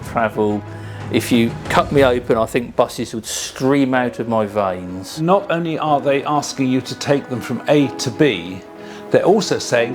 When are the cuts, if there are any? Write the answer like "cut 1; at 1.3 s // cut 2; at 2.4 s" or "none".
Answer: cut 1; at 5.0 s